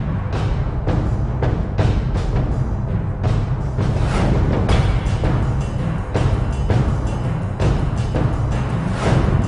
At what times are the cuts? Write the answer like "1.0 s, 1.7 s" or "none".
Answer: 7.5 s